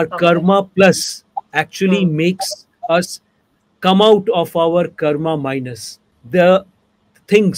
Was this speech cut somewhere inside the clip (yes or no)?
yes